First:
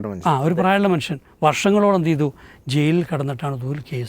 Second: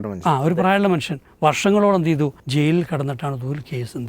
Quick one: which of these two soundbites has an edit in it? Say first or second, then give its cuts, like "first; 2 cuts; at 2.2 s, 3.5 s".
second; 1 cut; at 2.4 s